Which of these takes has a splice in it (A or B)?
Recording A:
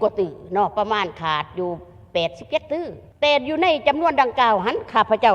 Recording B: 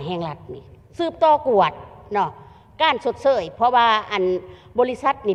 A